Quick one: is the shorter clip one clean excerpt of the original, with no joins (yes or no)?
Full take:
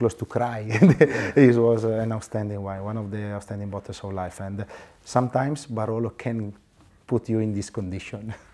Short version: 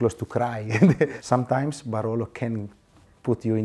no